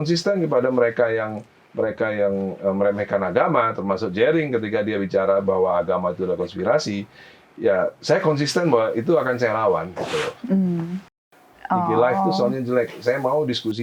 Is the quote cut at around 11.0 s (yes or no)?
yes